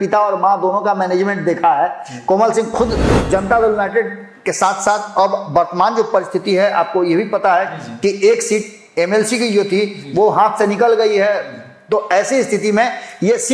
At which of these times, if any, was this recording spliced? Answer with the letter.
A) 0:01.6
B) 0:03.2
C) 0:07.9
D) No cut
B